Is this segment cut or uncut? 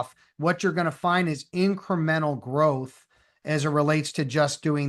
uncut